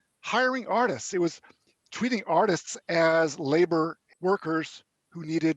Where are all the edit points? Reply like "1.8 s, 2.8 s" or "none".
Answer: 4.0 s